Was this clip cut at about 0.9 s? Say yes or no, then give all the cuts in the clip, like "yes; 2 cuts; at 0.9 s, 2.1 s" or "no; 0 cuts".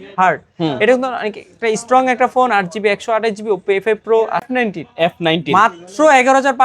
no; 1 cut; at 4.5 s